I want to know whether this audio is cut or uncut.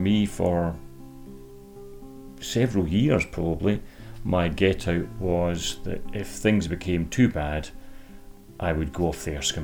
uncut